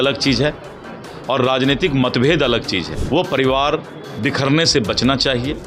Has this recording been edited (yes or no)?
yes